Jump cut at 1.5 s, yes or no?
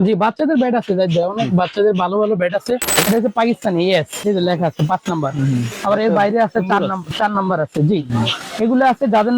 no